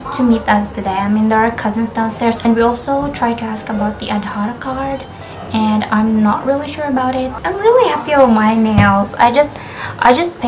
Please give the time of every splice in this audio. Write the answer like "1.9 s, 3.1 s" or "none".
2.5 s, 7.4 s